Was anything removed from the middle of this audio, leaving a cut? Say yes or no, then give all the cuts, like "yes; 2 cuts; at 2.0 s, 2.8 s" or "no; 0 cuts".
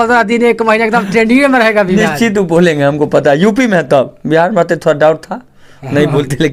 no; 0 cuts